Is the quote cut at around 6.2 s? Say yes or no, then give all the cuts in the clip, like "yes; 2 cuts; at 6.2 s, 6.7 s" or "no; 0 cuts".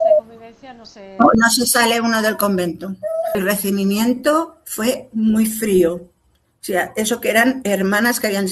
no; 1 cut; at 3.3 s